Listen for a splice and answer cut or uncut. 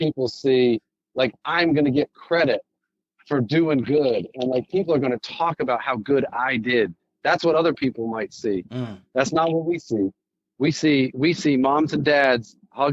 uncut